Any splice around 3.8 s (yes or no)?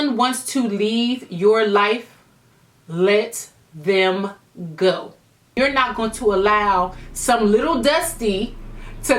no